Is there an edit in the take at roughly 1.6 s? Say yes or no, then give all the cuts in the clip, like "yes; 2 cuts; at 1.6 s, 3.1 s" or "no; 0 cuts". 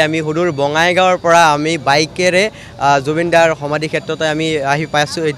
no; 0 cuts